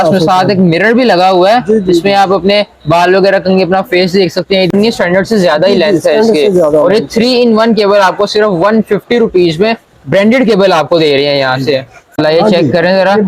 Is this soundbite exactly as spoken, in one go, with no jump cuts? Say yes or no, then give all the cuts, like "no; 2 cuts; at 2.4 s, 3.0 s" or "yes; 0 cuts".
no; 2 cuts; at 4.7 s, 12.2 s